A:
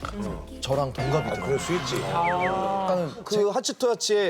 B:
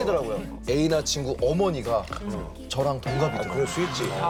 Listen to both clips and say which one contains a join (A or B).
A